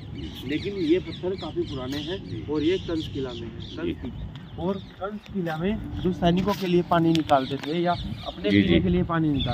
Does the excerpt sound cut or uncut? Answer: cut